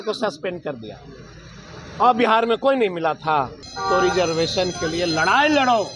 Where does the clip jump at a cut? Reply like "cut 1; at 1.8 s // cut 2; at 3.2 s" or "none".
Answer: cut 1; at 3.6 s